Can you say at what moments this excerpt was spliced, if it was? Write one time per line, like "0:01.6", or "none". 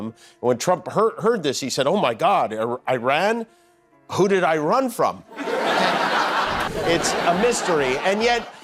0:06.7